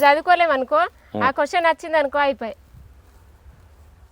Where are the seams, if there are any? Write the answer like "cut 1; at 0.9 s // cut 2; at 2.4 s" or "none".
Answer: none